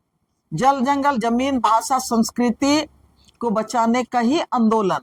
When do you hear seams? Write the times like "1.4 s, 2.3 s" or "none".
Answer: none